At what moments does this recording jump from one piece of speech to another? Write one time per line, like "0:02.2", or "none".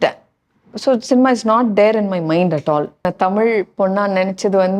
0:03.1